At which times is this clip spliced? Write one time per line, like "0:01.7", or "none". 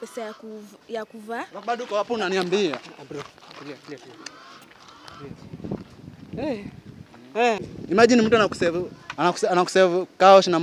0:07.7